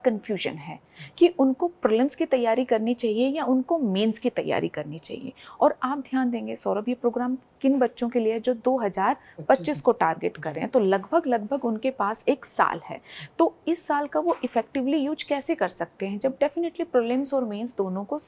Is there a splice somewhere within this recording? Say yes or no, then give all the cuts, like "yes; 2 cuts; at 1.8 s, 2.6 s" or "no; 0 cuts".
no; 0 cuts